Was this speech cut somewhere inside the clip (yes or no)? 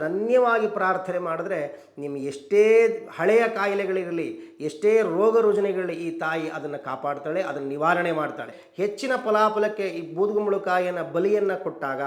yes